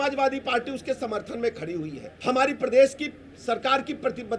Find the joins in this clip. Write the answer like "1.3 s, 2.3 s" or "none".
2.0 s